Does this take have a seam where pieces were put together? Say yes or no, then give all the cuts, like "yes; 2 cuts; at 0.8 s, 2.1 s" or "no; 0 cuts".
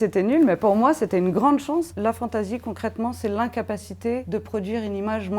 yes; 2 cuts; at 1.9 s, 4.2 s